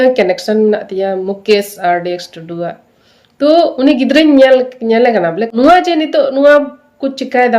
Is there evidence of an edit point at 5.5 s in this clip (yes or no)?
yes